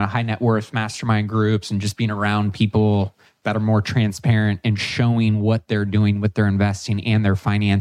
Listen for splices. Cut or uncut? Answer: uncut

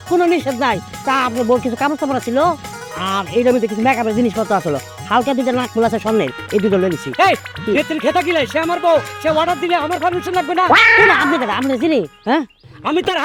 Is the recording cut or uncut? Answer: uncut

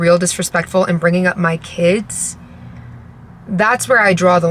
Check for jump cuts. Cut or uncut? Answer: uncut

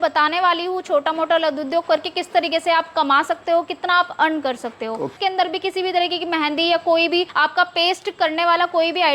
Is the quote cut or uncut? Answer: cut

